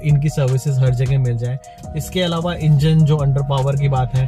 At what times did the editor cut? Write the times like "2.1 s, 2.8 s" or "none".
1.7 s